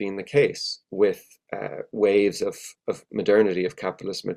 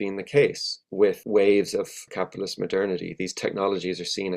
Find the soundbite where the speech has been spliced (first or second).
second